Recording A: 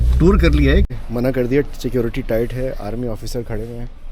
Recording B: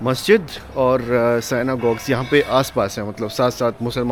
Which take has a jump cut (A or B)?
A